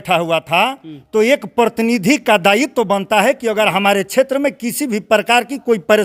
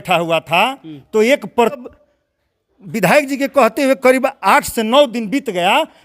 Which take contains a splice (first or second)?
second